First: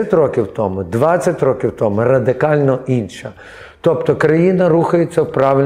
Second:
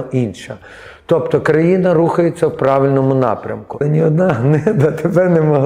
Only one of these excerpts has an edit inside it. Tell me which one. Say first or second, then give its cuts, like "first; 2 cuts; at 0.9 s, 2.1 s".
second; 1 cut; at 3.8 s